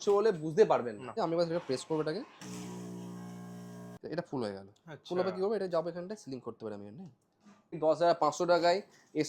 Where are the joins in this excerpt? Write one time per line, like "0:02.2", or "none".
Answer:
0:01.1
0:03.9
0:07.8